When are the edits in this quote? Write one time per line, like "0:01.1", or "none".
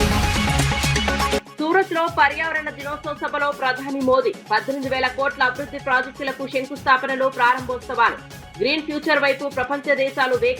0:01.3